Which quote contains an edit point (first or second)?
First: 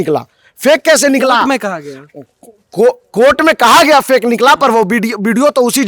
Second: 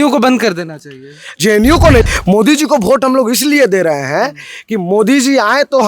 second